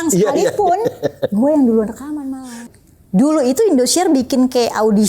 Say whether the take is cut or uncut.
cut